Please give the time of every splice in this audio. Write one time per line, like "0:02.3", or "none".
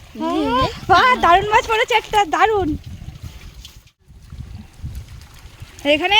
0:03.9

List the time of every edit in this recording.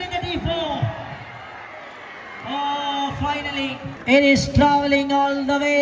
0:03.9

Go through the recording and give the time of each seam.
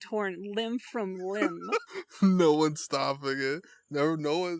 0:02.0

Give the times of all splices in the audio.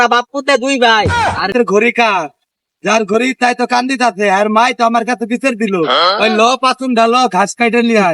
0:01.5

